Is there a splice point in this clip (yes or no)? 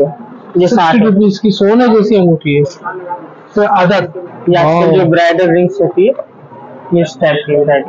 yes